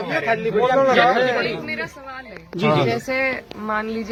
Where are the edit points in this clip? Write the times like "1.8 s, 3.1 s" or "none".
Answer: none